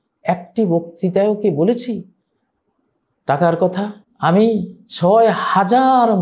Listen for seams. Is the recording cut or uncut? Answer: cut